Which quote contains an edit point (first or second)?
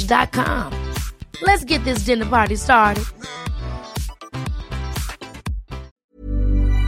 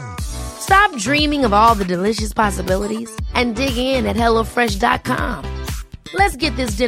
first